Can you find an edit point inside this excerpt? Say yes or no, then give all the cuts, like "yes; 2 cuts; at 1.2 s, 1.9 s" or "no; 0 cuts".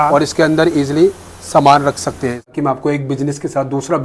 yes; 1 cut; at 2.5 s